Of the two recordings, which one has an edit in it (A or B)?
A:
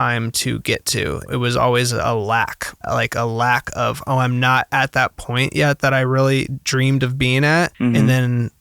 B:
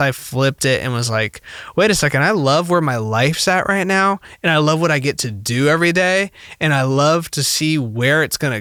A